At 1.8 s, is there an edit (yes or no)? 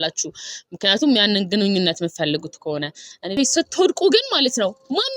no